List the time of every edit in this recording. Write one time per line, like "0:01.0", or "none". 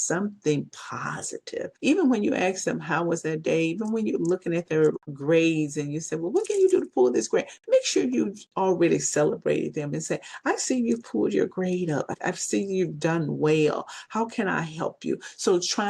0:01.7
0:05.1
0:12.2